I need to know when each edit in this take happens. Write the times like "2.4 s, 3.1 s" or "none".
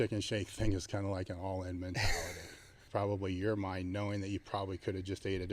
2.9 s